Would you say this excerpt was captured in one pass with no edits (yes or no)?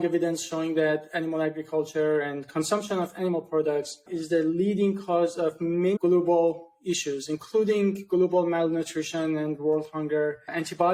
yes